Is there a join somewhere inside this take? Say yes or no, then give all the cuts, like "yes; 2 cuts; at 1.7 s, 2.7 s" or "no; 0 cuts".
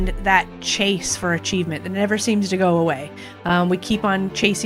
no; 0 cuts